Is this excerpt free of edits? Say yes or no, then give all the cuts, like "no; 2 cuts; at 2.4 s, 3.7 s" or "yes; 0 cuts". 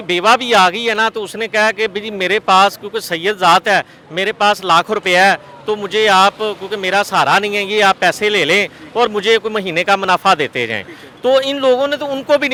yes; 0 cuts